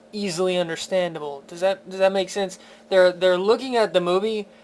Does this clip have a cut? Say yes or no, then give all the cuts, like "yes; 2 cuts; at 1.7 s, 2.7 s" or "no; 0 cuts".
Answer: yes; 1 cut; at 2.2 s